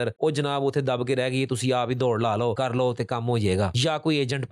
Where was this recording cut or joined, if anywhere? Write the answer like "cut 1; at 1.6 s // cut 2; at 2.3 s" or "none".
cut 1; at 2.6 s // cut 2; at 3.7 s